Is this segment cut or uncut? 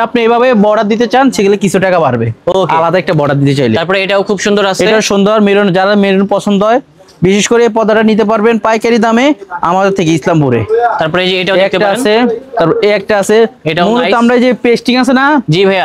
uncut